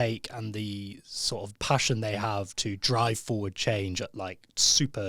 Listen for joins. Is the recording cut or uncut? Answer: uncut